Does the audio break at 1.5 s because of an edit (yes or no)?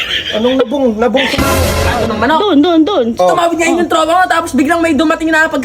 yes